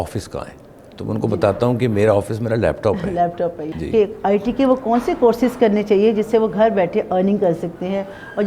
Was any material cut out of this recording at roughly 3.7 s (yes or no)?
yes